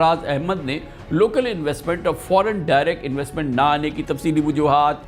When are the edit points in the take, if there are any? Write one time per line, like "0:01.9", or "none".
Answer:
none